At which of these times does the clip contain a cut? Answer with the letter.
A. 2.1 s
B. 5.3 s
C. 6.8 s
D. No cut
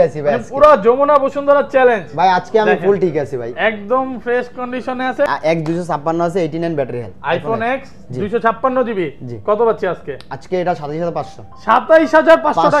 B